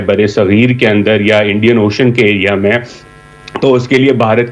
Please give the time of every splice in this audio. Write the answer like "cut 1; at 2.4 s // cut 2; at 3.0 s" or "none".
none